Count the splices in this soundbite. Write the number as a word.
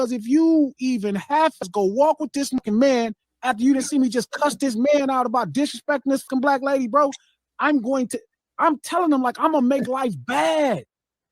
three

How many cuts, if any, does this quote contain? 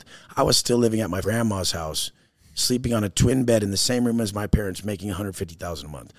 one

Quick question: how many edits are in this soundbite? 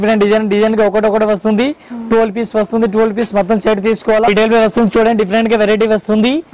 one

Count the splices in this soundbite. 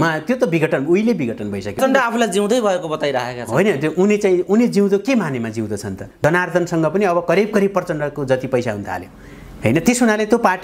two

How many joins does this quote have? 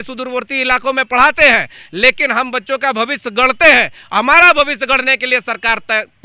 zero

